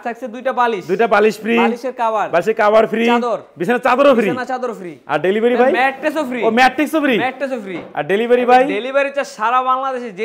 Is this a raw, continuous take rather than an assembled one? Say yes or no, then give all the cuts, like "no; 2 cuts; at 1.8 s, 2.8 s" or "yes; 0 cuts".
yes; 0 cuts